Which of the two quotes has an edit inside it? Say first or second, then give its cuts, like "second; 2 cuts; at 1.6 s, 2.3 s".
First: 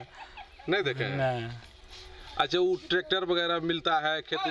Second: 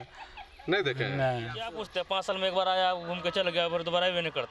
second; 1 cut; at 1.8 s